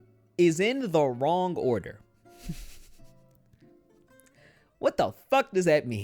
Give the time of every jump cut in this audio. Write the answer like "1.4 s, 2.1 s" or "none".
none